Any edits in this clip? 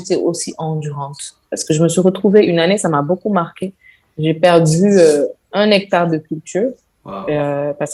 no; 0 cuts

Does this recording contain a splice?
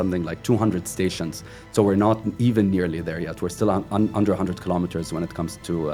no; 0 cuts

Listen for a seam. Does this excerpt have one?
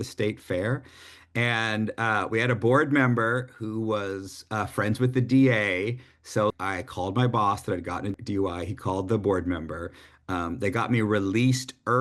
yes; 2 cuts; at 6.5 s, 8.1 s

